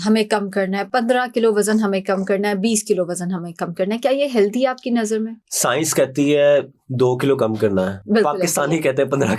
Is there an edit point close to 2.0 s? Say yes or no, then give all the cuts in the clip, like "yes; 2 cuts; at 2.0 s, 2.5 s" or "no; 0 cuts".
no; 0 cuts